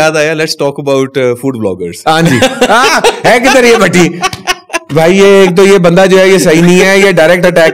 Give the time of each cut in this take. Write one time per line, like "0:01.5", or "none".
none